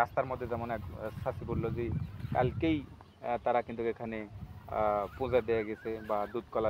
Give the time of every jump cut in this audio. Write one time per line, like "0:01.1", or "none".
none